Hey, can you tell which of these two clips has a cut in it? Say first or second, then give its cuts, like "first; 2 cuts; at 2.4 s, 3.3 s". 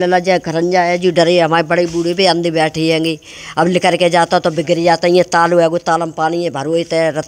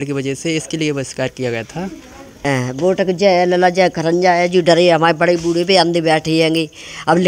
second; 1 cut; at 2.4 s